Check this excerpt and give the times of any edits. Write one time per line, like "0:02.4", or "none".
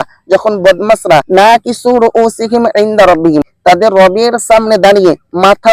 0:01.3
0:03.5